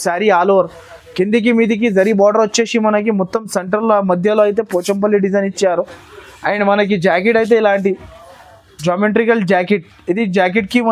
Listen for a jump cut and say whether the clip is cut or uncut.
uncut